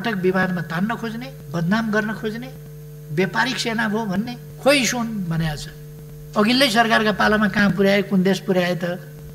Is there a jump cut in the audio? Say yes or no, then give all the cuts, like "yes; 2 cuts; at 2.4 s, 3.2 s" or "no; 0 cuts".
yes; 2 cuts; at 1.4 s, 4.4 s